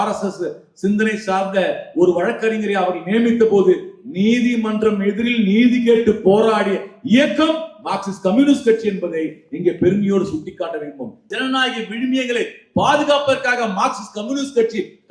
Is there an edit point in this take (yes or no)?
yes